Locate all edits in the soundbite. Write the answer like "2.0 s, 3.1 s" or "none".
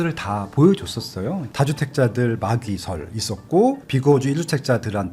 1.5 s